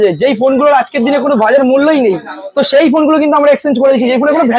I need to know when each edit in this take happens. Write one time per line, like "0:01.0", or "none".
none